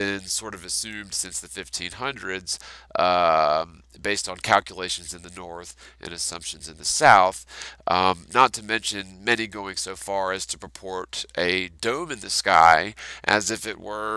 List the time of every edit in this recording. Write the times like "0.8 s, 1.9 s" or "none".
none